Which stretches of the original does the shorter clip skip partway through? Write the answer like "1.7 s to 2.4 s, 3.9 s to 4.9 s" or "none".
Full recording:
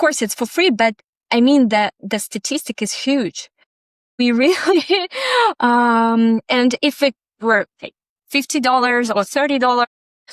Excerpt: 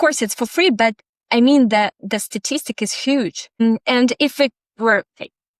3.6 s to 6.2 s